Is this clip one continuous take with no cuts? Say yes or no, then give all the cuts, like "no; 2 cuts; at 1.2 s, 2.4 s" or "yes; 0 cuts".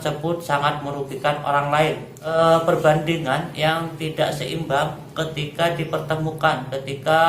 no; 1 cut; at 2.1 s